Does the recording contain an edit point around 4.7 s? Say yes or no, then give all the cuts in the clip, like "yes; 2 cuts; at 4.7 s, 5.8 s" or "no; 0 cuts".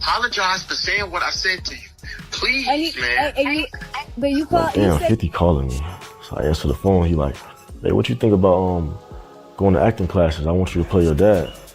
yes; 1 cut; at 4.7 s